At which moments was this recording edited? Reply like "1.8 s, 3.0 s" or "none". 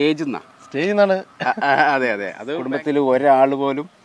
2.3 s